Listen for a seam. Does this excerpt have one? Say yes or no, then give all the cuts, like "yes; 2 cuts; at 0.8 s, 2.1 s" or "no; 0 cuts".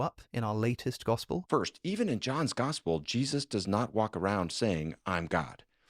yes; 1 cut; at 1.4 s